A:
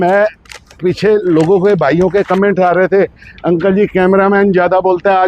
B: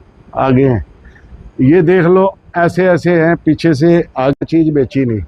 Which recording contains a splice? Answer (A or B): B